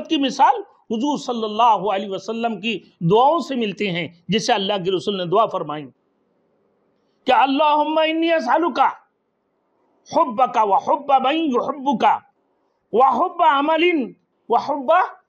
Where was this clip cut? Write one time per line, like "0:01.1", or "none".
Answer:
none